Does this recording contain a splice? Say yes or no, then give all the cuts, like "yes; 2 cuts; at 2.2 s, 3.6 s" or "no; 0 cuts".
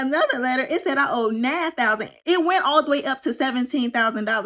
yes; 1 cut; at 2.1 s